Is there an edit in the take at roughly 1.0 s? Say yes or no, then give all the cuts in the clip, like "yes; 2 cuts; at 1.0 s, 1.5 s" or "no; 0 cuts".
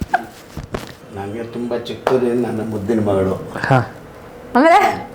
yes; 1 cut; at 1.0 s